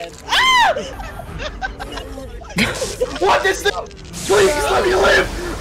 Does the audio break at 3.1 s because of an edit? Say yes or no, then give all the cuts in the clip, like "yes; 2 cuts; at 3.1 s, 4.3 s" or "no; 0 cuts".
no; 1 cut; at 0.9 s